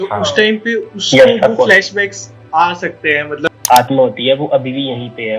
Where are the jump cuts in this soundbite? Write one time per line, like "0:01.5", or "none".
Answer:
0:03.5